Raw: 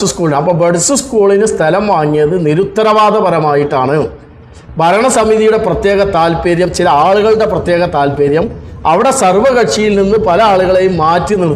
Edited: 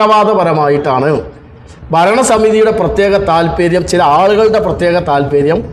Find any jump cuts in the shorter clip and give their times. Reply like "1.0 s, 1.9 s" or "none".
none